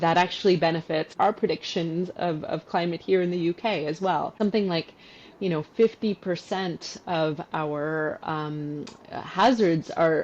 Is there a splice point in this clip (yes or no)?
yes